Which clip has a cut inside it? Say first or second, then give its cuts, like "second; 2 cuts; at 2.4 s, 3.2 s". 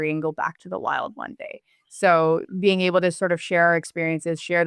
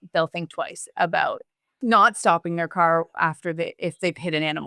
second; 1 cut; at 1.8 s